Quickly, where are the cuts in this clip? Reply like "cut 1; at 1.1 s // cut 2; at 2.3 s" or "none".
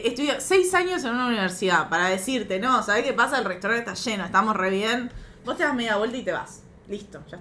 none